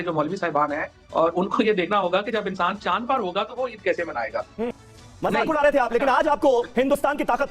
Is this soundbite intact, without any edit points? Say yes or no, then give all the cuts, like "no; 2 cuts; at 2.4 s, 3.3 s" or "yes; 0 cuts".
no; 1 cut; at 4.8 s